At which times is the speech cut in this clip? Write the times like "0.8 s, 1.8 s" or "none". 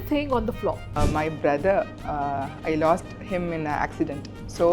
0.9 s